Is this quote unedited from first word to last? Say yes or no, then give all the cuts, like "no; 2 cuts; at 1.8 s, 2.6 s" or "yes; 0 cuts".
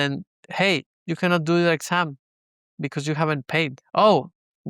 no; 2 cuts; at 0.9 s, 3.8 s